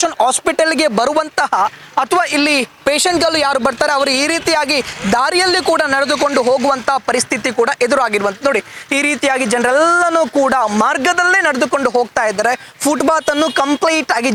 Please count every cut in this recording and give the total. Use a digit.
0